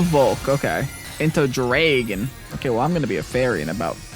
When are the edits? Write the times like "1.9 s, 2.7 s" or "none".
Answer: 1.0 s